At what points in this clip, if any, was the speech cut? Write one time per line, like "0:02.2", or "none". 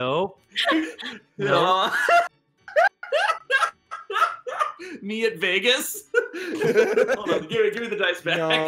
none